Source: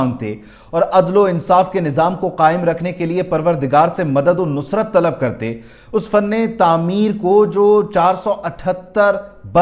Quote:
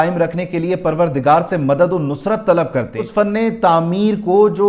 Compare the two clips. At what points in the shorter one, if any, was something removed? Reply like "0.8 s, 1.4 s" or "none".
3.0 s